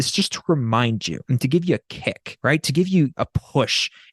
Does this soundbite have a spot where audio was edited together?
yes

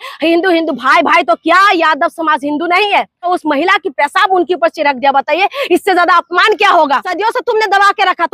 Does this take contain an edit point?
yes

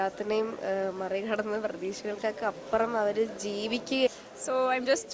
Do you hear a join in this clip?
yes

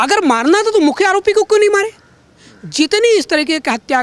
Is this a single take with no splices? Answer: yes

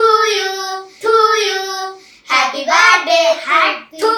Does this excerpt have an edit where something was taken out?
no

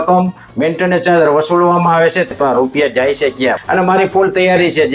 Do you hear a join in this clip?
yes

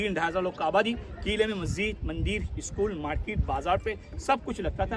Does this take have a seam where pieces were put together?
no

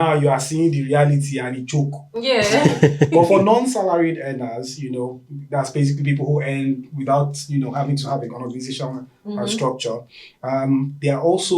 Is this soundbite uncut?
yes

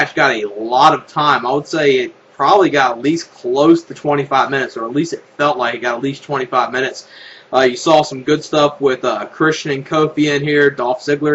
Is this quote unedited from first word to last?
no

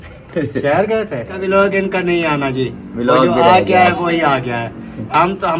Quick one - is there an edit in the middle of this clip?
yes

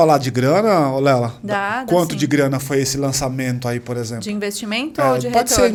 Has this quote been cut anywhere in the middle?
no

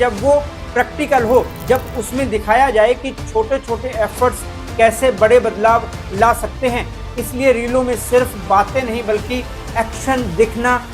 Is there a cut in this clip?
no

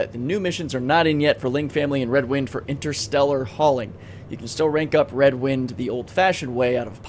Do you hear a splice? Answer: no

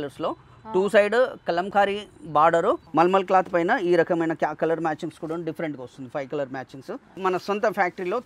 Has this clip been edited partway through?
yes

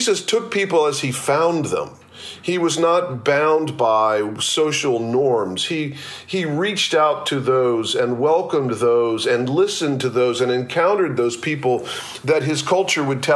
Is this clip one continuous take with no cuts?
yes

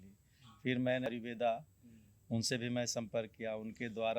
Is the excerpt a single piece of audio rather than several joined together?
no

